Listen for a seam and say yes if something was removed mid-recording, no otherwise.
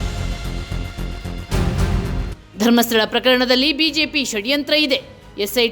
yes